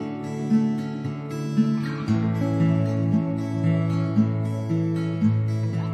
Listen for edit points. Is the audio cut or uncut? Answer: uncut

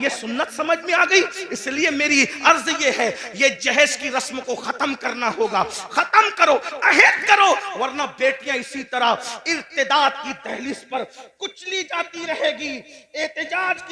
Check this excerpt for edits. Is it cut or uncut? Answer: uncut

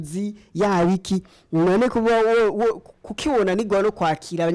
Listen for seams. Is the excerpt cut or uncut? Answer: uncut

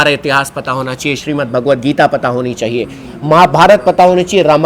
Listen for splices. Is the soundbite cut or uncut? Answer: uncut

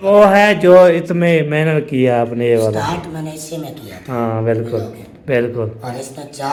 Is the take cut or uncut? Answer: uncut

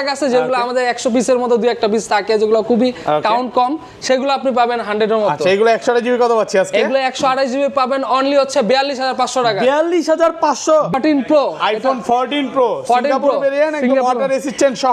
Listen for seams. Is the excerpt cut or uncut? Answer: cut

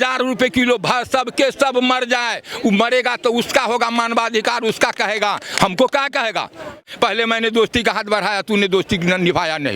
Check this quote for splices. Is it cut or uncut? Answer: cut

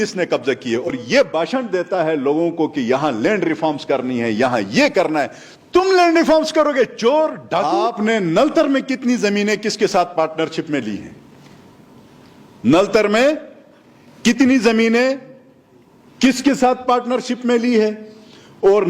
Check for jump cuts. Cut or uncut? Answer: cut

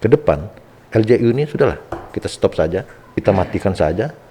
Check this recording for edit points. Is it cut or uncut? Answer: cut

